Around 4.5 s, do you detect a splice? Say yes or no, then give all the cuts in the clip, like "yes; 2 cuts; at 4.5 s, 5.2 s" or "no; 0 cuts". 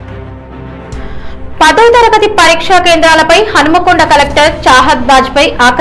no; 1 cut; at 0.9 s